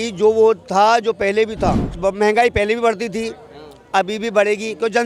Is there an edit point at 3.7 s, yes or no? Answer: no